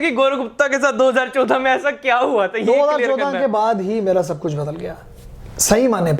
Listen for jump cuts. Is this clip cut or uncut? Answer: uncut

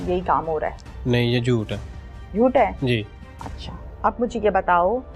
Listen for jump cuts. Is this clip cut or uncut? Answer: uncut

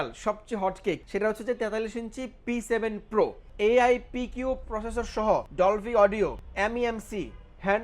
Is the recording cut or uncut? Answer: cut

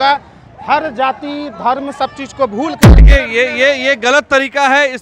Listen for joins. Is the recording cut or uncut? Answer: cut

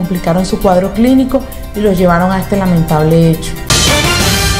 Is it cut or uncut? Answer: cut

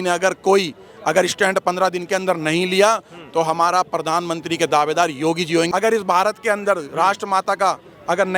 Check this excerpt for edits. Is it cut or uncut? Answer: cut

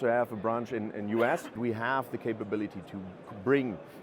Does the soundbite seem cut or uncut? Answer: cut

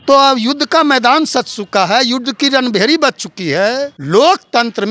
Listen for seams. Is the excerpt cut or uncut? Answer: cut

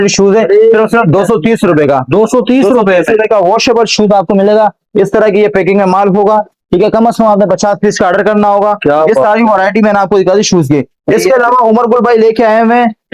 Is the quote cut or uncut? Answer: uncut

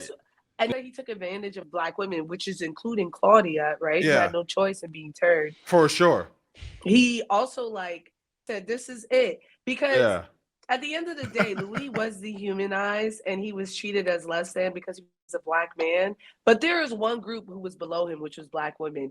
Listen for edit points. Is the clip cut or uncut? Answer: cut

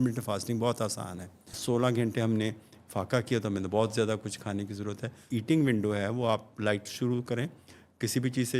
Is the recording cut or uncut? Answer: cut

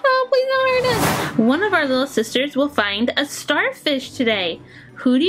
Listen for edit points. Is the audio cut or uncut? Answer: cut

